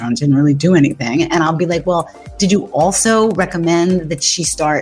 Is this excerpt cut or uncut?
uncut